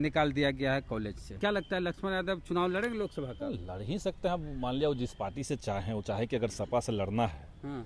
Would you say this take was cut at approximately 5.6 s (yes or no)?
no